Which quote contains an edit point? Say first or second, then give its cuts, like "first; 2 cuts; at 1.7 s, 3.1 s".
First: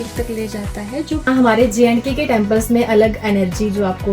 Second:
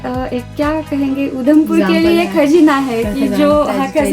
first; 1 cut; at 1.3 s